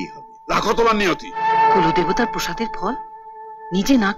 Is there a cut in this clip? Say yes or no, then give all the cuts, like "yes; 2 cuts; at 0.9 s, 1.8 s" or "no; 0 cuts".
yes; 1 cut; at 1.5 s